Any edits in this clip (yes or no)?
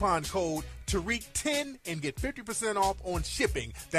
no